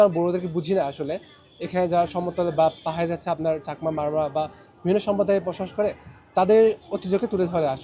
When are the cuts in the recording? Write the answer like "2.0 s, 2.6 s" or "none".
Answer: none